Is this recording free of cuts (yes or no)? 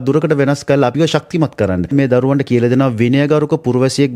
no